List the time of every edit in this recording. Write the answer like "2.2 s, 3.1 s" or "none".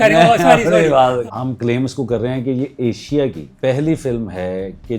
1.2 s, 3.5 s